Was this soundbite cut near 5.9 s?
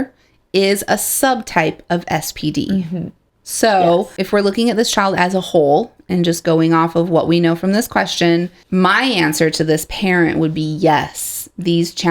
no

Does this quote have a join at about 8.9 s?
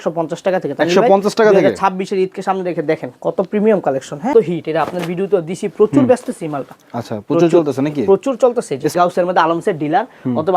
yes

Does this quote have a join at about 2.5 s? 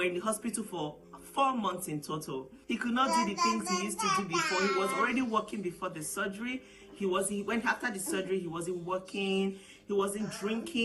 yes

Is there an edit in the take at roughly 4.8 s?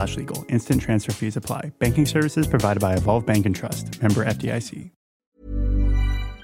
yes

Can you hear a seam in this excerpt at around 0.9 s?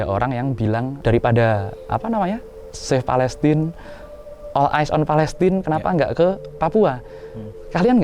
yes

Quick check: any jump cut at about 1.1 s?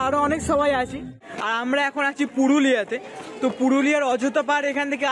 yes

